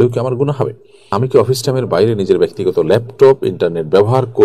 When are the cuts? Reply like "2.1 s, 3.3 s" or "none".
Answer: 1.1 s